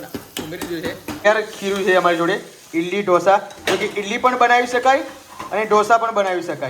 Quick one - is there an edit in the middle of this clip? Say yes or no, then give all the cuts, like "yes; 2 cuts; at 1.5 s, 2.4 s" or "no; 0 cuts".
yes; 1 cut; at 1.3 s